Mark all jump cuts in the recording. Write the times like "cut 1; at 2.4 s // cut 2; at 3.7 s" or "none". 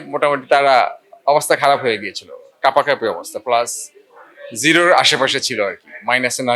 none